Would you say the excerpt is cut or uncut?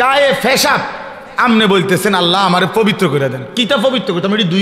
uncut